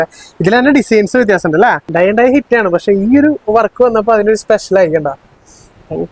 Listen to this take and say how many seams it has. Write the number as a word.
one